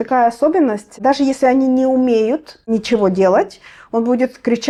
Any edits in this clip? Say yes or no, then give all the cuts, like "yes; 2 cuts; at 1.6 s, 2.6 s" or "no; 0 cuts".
no; 0 cuts